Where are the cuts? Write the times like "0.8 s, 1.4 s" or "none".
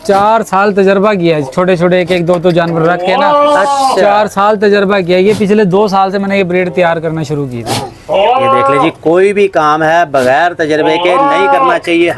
none